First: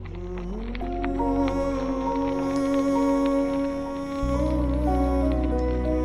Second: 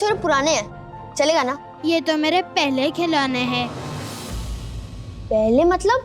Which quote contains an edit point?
second; 1 cut; at 1.7 s

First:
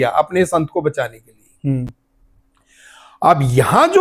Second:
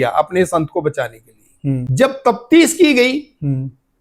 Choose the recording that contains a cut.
second; 1 cut; at 1.8 s

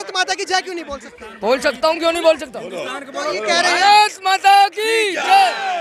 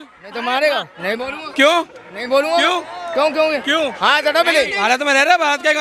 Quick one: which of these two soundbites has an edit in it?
second; 2 cuts; at 0.9 s, 4.8 s

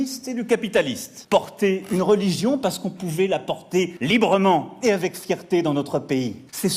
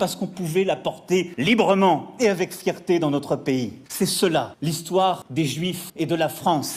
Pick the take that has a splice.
first; 1 cut; at 1.2 s

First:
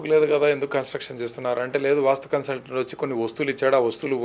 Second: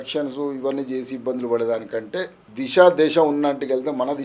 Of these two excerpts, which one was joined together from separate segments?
second; 1 cut; at 2.4 s

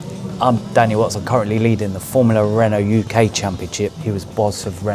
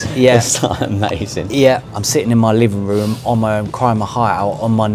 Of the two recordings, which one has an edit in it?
second; 1 cut; at 1.9 s

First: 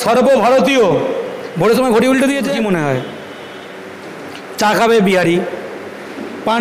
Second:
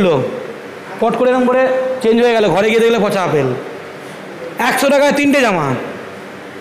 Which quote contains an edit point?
first; 1 cut; at 2.5 s

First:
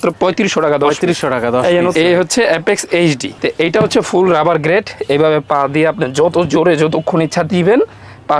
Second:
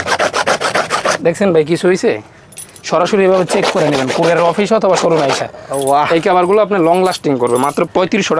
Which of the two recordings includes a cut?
first; 2 cuts; at 1.9 s, 3.3 s

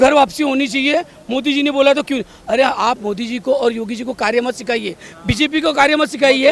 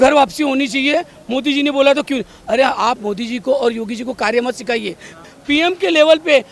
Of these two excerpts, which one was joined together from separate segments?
second; 1 cut; at 5.2 s

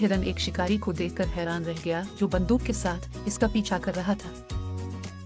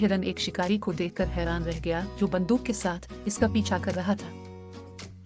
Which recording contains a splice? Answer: first; 1 cut; at 4.2 s

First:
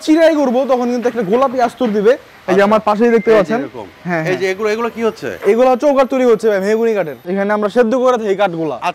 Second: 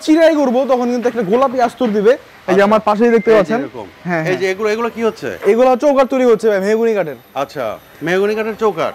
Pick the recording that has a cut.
first; 1 cut; at 7.2 s

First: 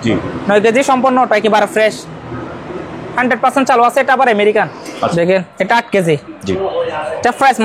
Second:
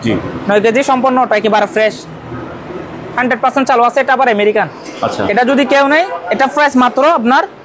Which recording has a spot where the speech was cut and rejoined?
first; 1 cut; at 5.1 s

